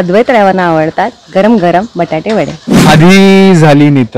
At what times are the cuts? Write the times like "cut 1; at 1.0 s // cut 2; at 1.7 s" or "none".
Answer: cut 1; at 2.8 s